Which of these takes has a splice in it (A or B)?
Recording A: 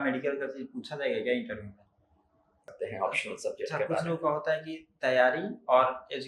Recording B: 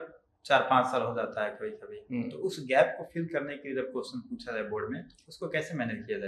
A